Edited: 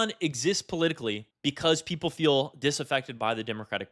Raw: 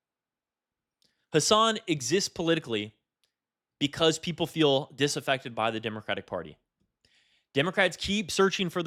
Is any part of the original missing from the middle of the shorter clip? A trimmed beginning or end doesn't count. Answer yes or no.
yes